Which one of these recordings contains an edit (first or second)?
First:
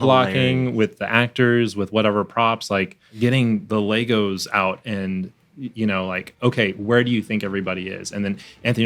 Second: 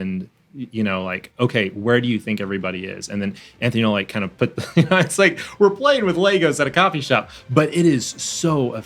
first